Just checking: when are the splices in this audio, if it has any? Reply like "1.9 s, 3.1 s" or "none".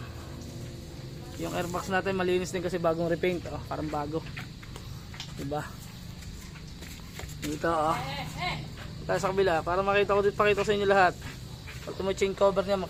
none